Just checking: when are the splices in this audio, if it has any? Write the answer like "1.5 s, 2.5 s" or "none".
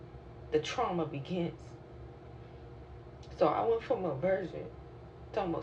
3.0 s